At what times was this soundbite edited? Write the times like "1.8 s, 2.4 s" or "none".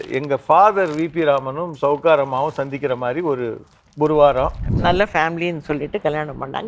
4.7 s